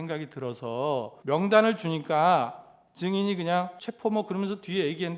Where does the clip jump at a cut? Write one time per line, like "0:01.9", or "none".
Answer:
0:01.1
0:03.8